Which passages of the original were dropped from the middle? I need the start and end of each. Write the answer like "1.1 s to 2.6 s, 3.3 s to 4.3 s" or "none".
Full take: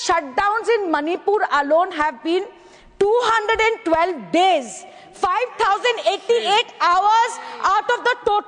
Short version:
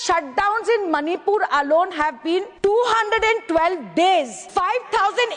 2.5 s to 2.9 s, 4.7 s to 5.0 s